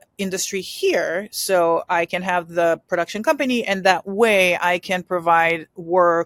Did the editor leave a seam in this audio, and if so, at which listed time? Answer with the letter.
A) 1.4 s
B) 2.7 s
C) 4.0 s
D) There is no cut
D